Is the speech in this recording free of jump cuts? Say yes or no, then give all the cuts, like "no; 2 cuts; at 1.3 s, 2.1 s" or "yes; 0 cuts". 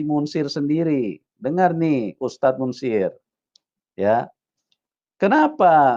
yes; 0 cuts